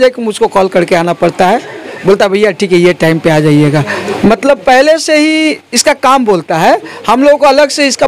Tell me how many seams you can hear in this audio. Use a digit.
0